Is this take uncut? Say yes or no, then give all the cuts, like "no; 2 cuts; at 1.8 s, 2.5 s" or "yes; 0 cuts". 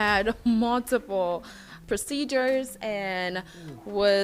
no; 1 cut; at 1.7 s